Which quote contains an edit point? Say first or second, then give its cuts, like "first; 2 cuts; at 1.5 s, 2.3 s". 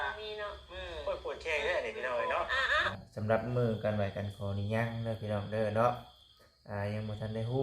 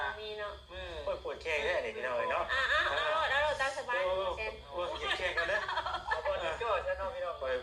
first; 1 cut; at 2.9 s